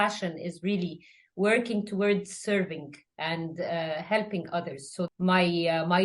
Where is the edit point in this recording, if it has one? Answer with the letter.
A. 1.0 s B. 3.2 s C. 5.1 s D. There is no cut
C